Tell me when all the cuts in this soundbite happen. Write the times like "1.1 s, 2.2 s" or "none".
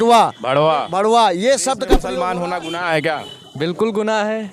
2.0 s